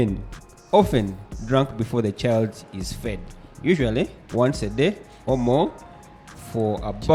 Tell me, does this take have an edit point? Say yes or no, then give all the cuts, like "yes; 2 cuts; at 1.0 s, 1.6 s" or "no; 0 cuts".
no; 0 cuts